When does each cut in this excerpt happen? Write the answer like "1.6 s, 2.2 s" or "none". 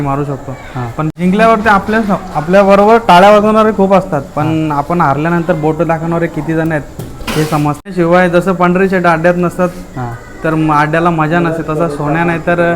1.1 s, 7.9 s